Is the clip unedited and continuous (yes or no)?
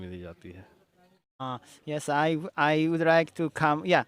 no